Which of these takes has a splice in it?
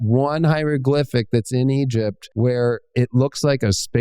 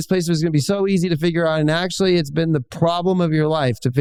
first; 1 cut; at 2.2 s

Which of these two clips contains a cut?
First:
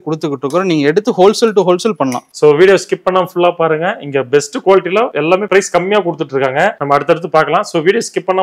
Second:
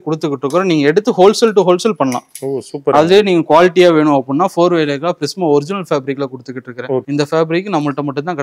first; 1 cut; at 2.3 s

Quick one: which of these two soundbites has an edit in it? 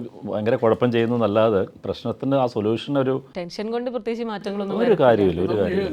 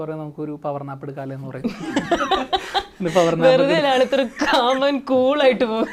first; 2 cuts; at 1.8 s, 3.4 s

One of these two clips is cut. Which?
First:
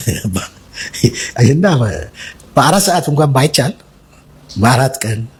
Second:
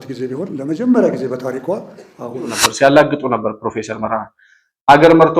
second; 1 cut; at 2.6 s

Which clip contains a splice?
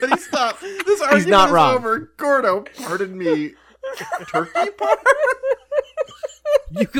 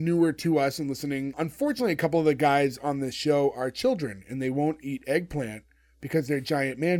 second; 1 cut; at 1.3 s

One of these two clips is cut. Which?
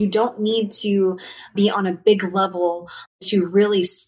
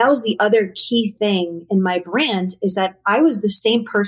first; 2 cuts; at 1.5 s, 3.1 s

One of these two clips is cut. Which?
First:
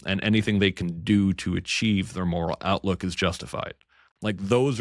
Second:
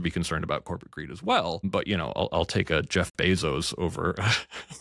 second; 1 cut; at 1.6 s

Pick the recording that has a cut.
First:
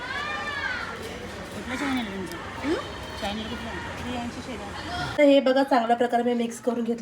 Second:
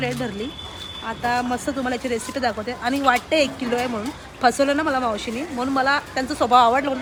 first; 1 cut; at 5.1 s

